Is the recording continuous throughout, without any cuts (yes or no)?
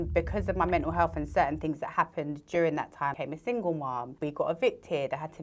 no